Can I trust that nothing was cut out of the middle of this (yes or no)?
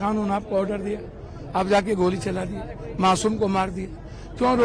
yes